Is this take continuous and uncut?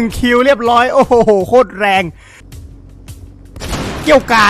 no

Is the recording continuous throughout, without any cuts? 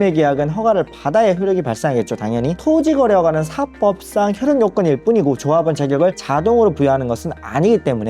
no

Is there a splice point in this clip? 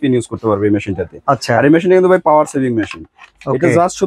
no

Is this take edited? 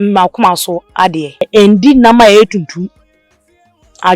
yes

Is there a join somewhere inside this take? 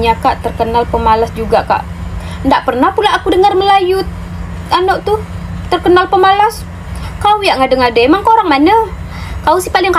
no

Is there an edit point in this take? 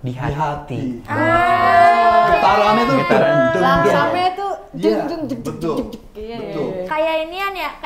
no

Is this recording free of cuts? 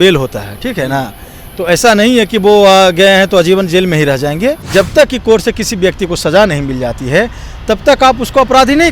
no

